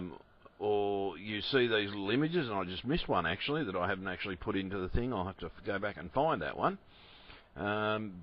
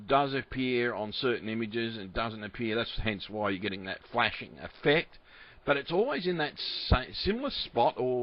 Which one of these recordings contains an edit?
first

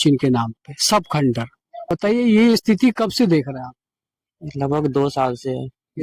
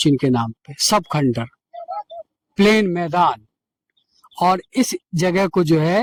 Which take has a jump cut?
first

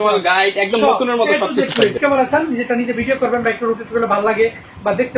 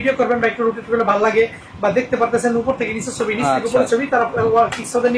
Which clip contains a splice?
first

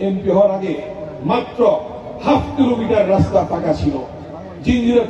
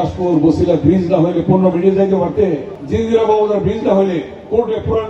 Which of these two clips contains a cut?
second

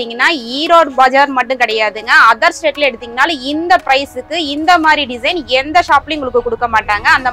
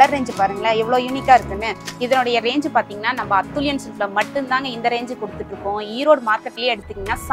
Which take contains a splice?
second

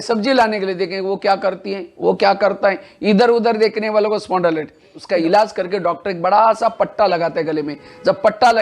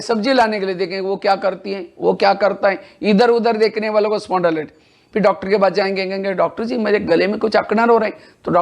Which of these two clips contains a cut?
first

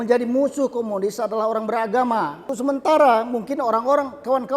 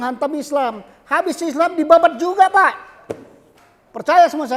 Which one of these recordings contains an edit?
first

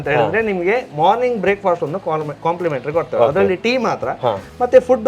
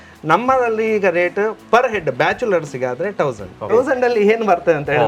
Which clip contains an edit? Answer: second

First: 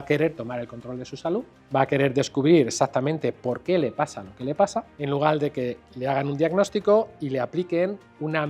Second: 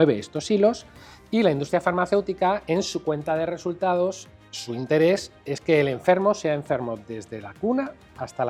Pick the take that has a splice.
first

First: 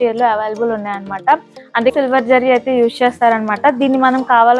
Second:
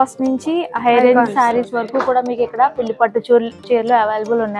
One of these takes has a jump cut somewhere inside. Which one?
first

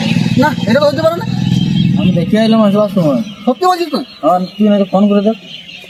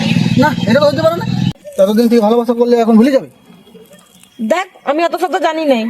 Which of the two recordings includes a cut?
second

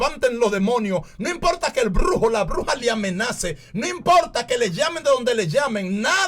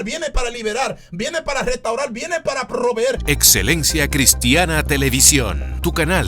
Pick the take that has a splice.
second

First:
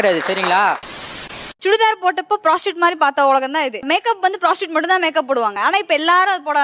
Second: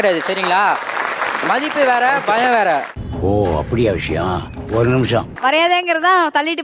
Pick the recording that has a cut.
first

